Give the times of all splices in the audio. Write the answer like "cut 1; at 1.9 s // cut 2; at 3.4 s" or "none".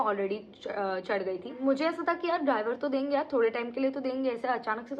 cut 1; at 1.6 s